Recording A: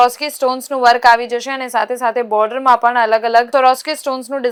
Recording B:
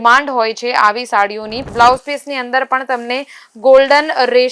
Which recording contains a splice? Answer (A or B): B